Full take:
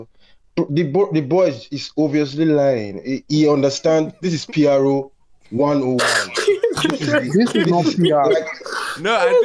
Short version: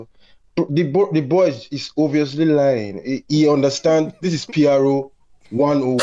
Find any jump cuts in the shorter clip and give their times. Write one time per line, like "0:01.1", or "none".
none